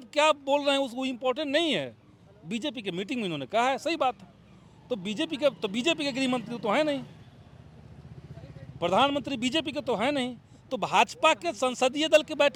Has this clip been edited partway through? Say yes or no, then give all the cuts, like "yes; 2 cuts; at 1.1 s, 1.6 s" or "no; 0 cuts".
no; 0 cuts